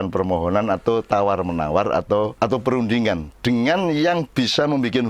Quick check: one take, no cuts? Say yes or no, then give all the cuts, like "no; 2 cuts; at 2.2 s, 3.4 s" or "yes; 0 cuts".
no; 1 cut; at 2.3 s